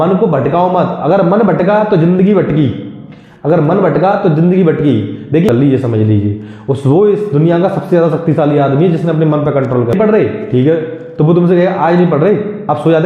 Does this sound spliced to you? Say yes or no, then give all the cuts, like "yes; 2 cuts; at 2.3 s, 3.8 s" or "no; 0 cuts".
yes; 2 cuts; at 5.5 s, 9.9 s